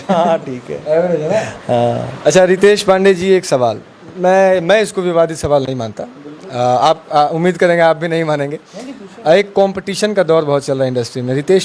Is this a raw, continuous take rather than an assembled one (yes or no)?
yes